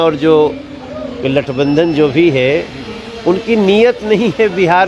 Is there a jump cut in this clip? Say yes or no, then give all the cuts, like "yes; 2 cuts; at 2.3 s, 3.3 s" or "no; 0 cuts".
no; 0 cuts